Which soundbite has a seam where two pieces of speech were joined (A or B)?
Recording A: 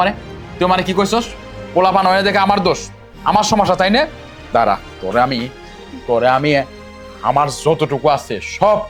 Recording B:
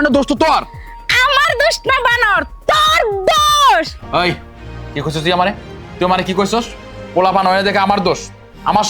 B